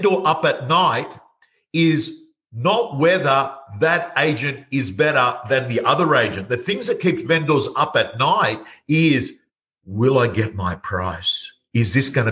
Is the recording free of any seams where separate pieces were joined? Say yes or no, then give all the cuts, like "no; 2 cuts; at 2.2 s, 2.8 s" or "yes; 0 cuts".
yes; 0 cuts